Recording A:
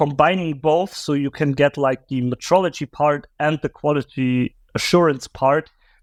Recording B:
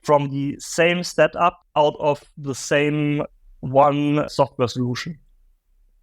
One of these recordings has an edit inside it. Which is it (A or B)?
B